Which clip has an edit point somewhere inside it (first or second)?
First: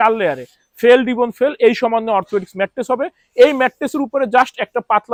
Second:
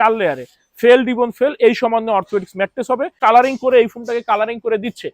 second